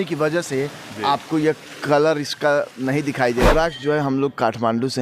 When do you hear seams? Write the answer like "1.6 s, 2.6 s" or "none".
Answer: 3.5 s